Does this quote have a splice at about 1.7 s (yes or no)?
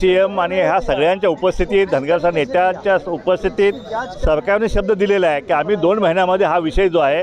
no